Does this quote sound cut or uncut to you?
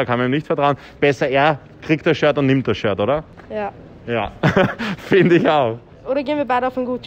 cut